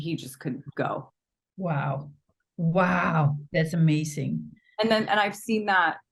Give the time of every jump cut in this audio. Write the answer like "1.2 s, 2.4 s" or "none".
none

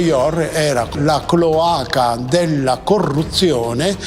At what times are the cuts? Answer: 0.9 s

